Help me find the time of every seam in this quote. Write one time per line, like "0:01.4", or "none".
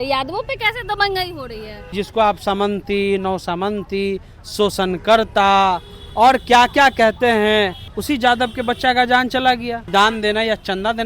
0:01.9
0:07.9
0:09.9